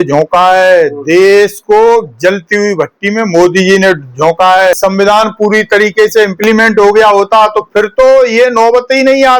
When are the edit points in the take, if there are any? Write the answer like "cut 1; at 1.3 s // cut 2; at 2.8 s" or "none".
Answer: cut 1; at 4.8 s